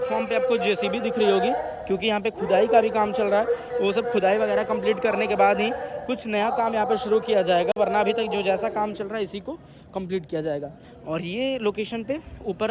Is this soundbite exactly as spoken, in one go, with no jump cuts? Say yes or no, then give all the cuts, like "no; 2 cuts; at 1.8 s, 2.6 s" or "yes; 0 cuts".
yes; 0 cuts